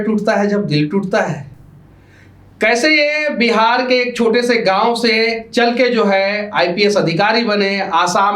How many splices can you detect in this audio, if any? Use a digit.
0